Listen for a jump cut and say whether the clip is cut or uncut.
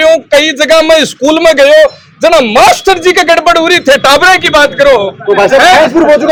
uncut